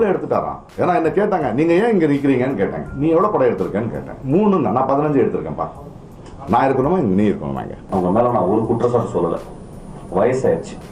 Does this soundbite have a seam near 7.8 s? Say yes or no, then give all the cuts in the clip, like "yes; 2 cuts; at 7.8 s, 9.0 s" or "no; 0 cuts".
yes; 1 cut; at 7.8 s